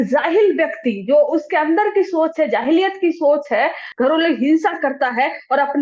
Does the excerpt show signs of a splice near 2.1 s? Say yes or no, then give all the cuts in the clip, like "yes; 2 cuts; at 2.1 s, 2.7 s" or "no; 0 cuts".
no; 1 cut; at 3.8 s